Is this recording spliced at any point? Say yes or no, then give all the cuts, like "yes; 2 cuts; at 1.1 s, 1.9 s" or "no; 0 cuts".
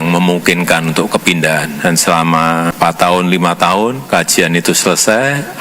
yes; 3 cuts; at 1.7 s, 2.7 s, 4.0 s